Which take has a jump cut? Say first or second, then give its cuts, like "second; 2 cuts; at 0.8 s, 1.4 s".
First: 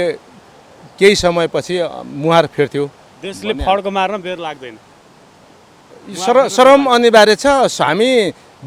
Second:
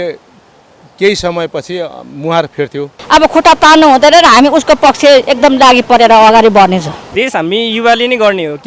second; 2 cuts; at 2.9 s, 7.0 s